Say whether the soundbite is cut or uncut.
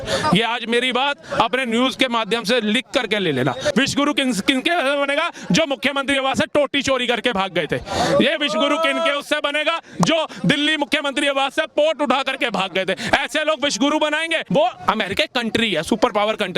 cut